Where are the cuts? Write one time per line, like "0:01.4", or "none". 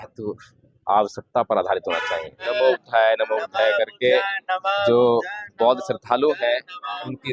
0:02.5